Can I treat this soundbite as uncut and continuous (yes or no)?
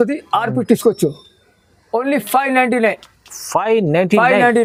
yes